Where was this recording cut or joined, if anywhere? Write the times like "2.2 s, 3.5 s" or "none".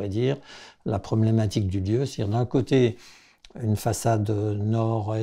none